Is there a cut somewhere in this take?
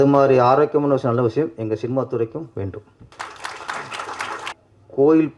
yes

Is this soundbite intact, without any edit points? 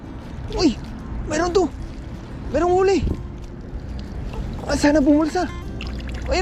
yes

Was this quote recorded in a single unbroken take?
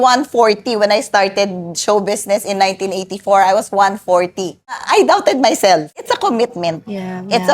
no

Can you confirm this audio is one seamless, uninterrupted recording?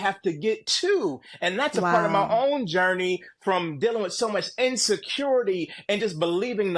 yes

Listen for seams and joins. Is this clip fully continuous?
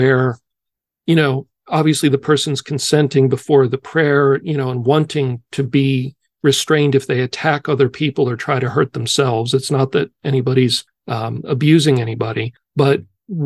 yes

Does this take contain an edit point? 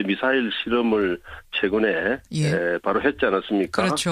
no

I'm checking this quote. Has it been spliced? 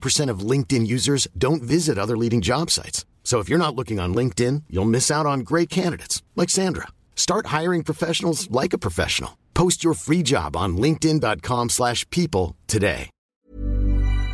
yes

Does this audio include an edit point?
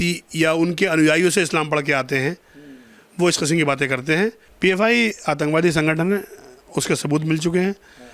yes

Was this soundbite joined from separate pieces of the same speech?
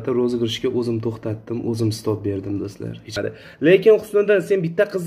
yes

